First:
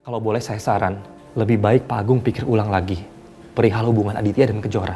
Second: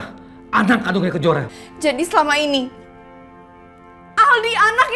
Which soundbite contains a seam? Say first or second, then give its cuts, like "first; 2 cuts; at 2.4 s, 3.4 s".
second; 1 cut; at 1.5 s